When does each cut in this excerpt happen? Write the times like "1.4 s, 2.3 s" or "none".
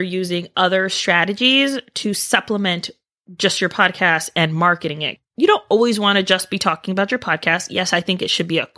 none